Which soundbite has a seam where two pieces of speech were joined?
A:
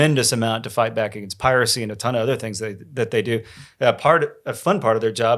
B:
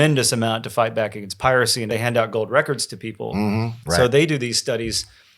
B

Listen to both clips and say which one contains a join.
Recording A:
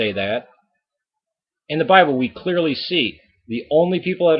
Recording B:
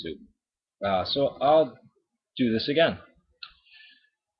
A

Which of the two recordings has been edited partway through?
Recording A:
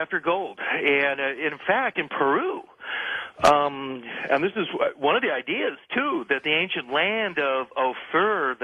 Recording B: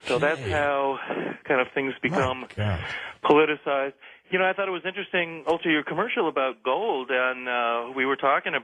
B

